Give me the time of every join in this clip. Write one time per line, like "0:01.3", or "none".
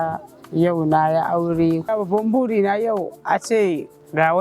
0:01.8